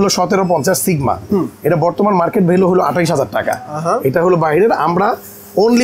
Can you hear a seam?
no; 0 cuts

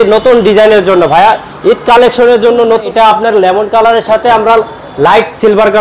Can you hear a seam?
yes; 1 cut; at 2.8 s

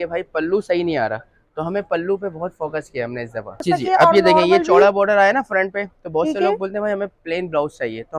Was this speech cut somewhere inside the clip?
yes; 1 cut; at 3.6 s

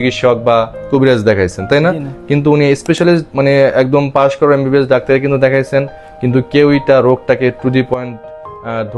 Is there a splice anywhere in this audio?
no; 0 cuts

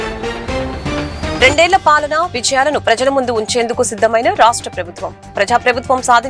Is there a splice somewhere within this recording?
no; 0 cuts

